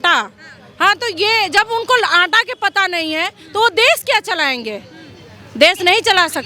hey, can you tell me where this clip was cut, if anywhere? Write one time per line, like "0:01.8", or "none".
none